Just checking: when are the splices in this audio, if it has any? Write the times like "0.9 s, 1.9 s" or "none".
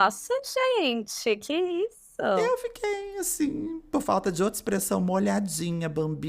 2.4 s